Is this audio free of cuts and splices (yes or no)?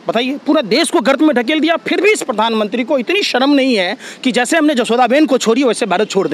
yes